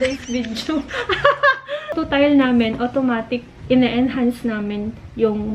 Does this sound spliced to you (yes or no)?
yes